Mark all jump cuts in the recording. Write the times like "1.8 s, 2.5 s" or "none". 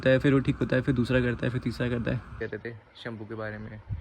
2.3 s